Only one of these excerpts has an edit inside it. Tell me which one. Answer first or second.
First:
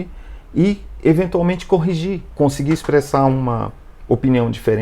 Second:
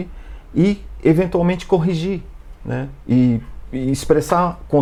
first